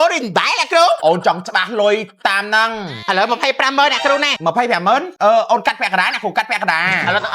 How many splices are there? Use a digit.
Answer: 3